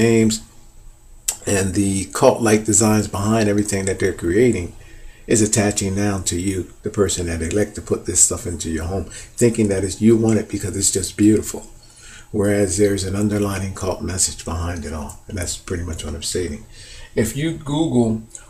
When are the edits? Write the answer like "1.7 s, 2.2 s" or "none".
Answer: none